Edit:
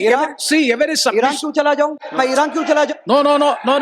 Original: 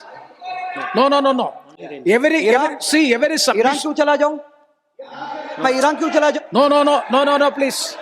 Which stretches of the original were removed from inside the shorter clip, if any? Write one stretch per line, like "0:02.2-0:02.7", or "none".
0:04.4-0:05.5